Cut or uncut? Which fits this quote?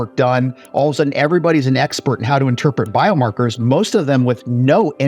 uncut